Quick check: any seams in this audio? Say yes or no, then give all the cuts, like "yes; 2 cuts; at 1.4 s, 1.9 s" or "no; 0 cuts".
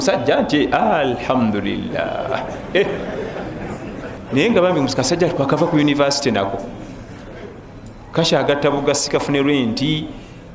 yes; 1 cut; at 4.1 s